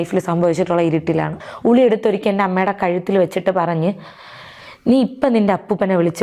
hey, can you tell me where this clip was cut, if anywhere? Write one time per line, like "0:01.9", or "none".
0:01.4